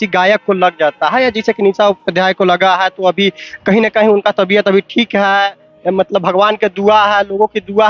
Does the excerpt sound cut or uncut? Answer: uncut